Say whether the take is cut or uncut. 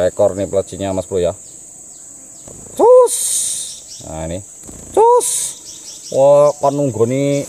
uncut